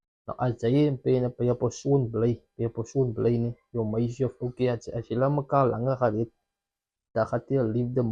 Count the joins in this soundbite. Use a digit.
1